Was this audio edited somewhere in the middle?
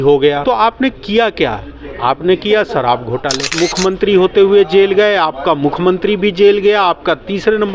yes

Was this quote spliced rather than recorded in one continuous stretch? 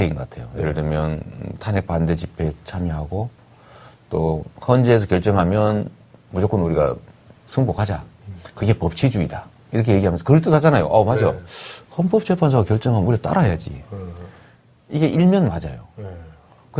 yes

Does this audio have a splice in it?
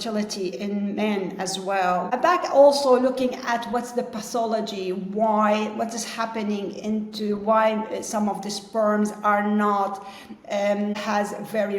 yes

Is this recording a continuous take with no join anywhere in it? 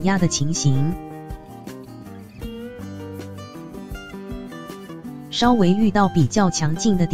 no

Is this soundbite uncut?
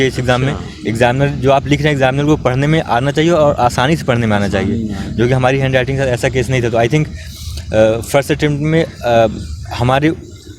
yes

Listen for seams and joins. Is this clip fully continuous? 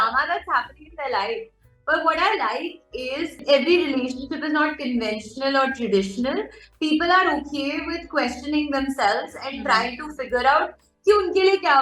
no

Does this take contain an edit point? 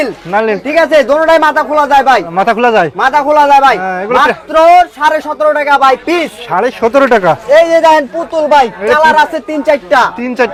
no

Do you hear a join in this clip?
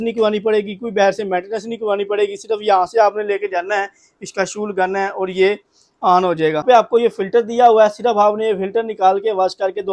yes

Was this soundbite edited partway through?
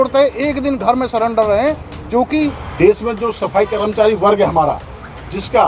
yes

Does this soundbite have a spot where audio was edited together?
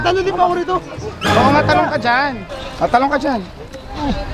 yes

